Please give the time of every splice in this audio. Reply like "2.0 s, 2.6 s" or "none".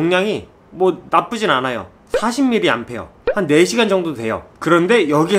3.1 s, 4.5 s